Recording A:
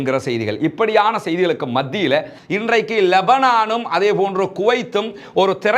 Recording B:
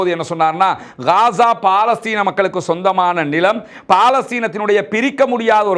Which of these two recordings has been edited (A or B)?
A